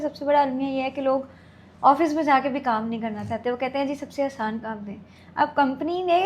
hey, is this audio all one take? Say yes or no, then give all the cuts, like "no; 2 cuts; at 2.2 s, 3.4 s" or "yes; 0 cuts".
yes; 0 cuts